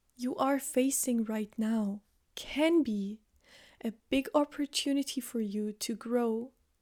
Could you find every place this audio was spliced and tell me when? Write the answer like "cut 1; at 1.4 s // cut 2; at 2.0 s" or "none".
none